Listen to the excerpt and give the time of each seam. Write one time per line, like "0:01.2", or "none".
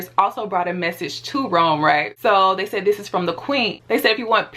0:02.1